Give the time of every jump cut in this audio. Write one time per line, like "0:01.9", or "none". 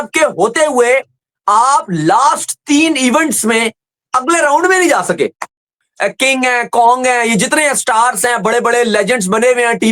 0:05.9